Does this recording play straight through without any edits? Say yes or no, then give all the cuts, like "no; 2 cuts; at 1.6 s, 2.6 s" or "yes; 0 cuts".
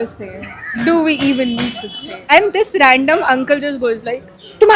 no; 1 cut; at 2.1 s